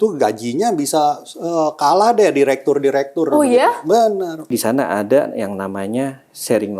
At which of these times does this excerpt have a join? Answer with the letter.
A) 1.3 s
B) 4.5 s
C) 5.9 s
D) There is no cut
B